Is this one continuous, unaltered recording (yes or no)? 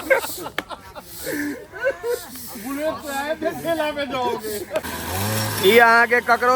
no